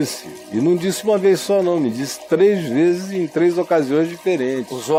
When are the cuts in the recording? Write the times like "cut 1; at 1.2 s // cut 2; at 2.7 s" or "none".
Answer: none